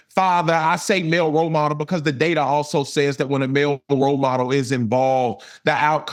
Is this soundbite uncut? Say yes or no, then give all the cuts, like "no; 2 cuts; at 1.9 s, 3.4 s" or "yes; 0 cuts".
yes; 0 cuts